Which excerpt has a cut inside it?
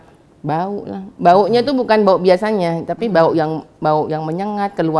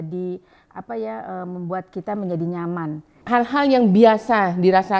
second; 1 cut; at 3.1 s

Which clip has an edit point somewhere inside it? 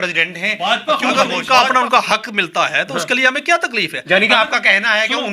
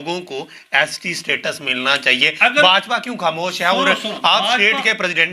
first; 1 cut; at 1.3 s

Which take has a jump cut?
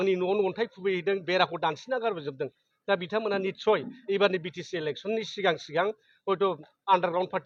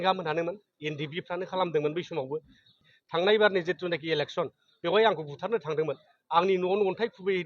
second; 1 cut; at 2.7 s

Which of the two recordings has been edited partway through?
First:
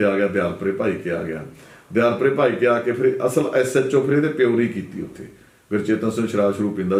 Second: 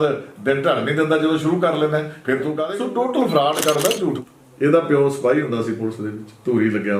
second; 2 cuts; at 2.6 s, 4.2 s

